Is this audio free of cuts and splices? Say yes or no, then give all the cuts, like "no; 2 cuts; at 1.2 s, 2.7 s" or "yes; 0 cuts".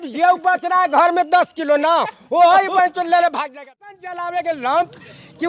no; 1 cut; at 3.5 s